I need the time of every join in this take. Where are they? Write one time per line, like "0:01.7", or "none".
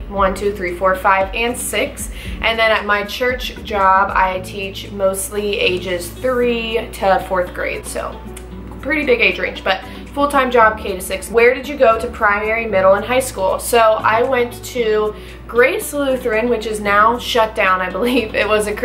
none